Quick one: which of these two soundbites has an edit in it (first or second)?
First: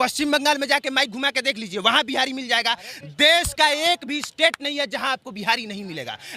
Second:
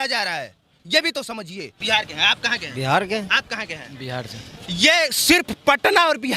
second